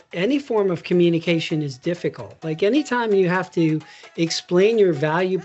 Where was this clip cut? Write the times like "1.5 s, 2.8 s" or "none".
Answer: none